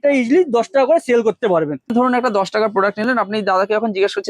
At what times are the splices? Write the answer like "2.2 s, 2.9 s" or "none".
1.9 s